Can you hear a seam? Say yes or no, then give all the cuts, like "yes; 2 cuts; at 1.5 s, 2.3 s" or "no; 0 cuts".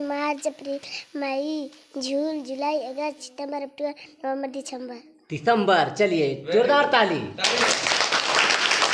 no; 0 cuts